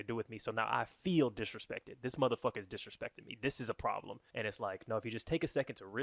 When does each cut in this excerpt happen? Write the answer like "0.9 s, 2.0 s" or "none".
4.2 s